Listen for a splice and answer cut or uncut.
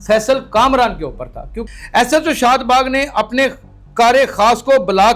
cut